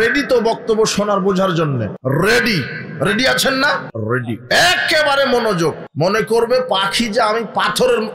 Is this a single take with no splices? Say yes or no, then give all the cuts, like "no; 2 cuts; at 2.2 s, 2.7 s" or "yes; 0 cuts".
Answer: no; 3 cuts; at 1.9 s, 3.9 s, 5.9 s